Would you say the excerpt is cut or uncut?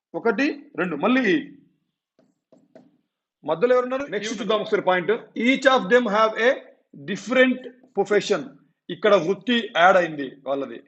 cut